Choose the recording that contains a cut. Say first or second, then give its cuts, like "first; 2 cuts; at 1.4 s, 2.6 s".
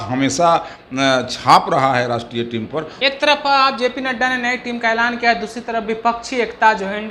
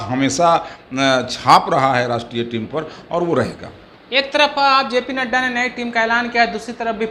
first; 1 cut; at 2.9 s